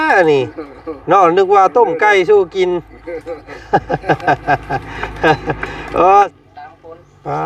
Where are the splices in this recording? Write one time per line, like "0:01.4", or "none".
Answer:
0:06.3